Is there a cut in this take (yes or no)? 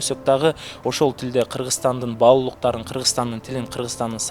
no